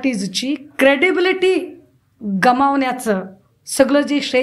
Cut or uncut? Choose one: uncut